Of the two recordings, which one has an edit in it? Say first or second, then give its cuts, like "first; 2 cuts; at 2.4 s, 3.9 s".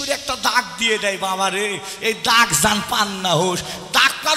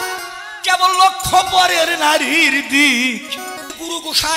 second; 1 cut; at 3.4 s